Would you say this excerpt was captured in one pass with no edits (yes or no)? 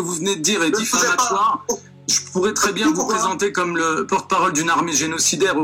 yes